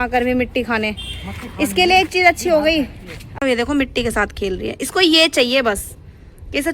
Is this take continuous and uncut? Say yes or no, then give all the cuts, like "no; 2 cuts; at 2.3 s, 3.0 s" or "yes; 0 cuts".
no; 1 cut; at 3.4 s